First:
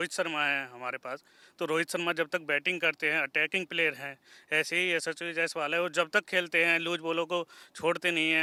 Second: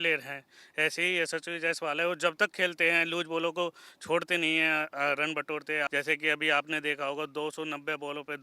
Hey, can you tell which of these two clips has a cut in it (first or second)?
second